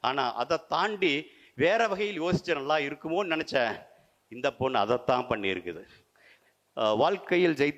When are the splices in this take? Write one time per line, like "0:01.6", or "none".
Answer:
0:06.3